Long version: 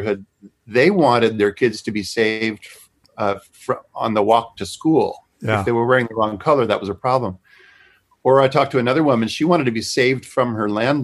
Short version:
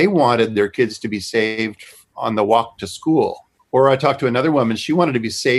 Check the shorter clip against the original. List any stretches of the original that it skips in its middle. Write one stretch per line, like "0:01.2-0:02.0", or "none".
0:02.9-0:03.9
0:05.3-0:08.0